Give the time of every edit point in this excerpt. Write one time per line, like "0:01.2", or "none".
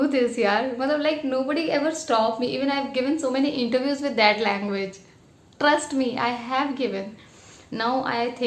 none